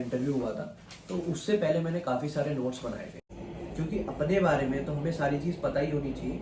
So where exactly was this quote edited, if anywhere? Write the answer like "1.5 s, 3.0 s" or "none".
3.8 s